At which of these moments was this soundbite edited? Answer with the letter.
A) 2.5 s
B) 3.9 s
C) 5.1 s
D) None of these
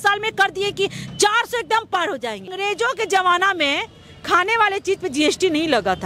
A